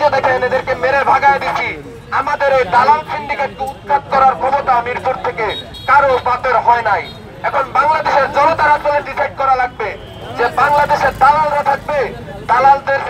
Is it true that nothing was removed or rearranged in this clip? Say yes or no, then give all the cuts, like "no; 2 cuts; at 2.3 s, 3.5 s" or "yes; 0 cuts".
yes; 0 cuts